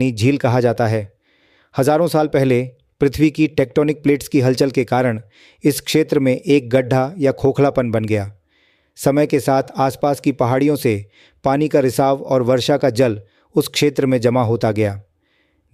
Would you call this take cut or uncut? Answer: uncut